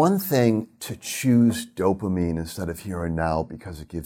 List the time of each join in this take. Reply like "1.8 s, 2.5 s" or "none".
none